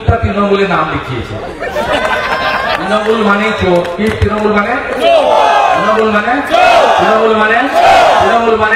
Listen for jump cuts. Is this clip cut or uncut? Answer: uncut